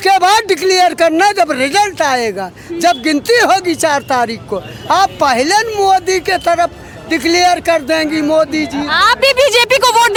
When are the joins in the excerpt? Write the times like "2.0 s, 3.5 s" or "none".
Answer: none